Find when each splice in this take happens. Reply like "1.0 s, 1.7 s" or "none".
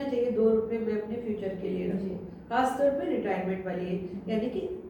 none